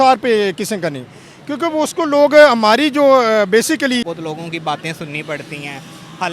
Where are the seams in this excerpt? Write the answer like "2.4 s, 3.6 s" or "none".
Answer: 4.0 s